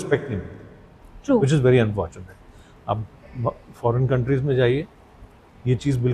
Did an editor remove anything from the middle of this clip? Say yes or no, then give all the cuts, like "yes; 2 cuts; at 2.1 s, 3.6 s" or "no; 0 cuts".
no; 0 cuts